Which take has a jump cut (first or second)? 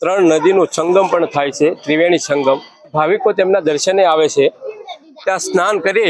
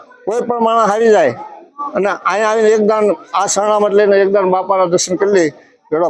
first